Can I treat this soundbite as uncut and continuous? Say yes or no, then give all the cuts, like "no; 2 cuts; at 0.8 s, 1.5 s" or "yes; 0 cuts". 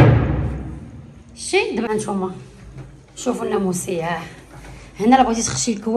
no; 1 cut; at 1.9 s